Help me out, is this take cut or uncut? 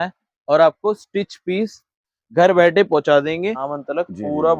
cut